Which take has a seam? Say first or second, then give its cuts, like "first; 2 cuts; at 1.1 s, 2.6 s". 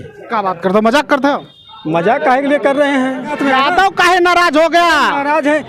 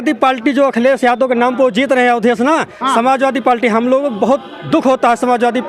first; 1 cut; at 3.4 s